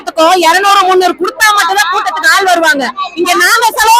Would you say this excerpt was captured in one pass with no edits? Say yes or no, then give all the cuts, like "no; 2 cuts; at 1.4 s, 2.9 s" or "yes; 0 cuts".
yes; 0 cuts